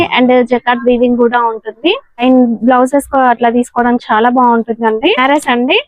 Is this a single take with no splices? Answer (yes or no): no